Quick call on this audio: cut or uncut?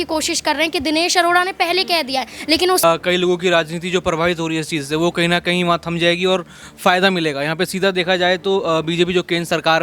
cut